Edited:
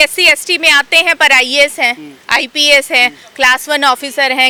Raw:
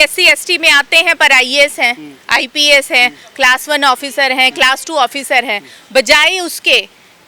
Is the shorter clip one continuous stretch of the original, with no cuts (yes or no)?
yes